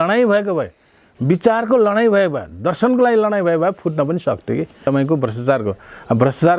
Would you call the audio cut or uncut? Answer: cut